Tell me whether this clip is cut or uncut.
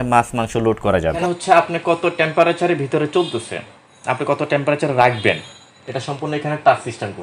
cut